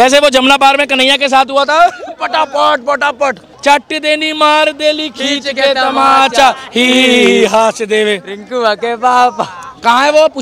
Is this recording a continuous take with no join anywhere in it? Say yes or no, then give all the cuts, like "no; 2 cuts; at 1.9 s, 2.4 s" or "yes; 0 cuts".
no; 1 cut; at 3.5 s